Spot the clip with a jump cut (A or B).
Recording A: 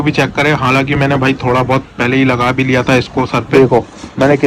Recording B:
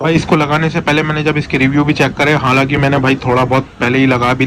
A